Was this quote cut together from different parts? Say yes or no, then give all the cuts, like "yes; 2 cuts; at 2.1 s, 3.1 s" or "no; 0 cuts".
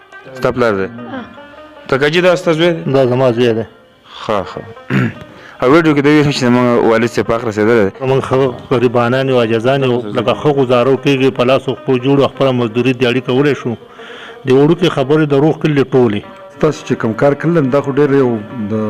yes; 2 cuts; at 8.0 s, 16.5 s